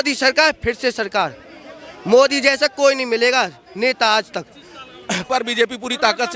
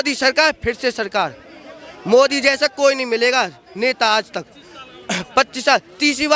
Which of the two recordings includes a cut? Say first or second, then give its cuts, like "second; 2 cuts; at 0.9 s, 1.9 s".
first; 1 cut; at 5.2 s